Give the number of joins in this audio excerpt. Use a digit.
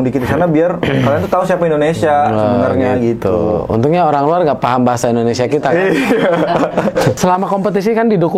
1